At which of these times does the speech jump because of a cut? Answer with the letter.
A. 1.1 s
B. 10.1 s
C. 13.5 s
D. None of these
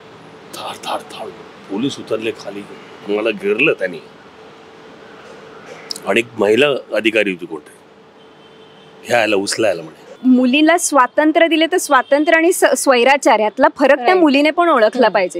B